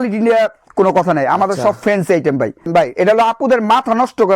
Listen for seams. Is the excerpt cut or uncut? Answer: cut